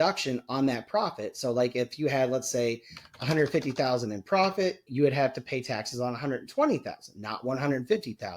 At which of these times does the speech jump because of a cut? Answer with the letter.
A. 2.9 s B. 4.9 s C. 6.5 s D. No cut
B